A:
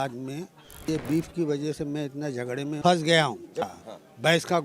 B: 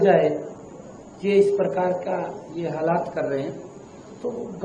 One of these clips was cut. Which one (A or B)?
A